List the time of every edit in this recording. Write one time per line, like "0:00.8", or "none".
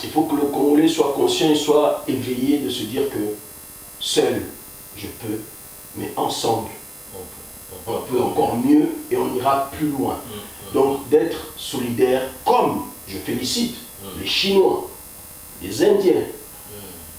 none